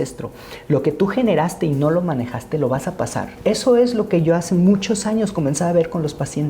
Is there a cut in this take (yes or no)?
yes